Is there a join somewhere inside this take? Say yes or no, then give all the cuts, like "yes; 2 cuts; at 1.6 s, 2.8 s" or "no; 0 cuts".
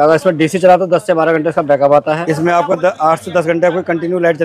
yes; 1 cut; at 2.2 s